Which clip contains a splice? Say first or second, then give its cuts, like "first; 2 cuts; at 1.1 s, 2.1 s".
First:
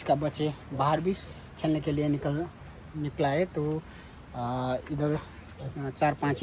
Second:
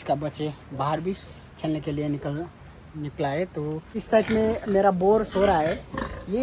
second; 1 cut; at 4.0 s